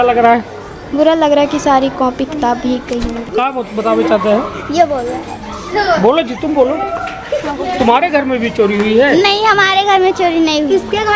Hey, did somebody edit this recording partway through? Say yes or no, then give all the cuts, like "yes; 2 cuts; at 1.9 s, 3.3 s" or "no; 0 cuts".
yes; 1 cut; at 3.3 s